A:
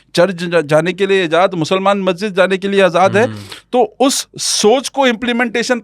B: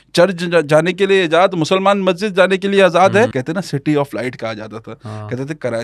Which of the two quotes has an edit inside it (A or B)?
B